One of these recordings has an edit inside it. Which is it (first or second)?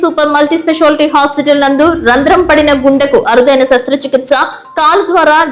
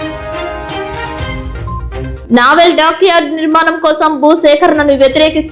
second